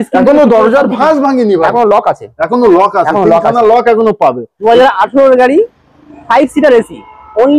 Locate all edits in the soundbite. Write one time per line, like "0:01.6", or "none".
0:04.5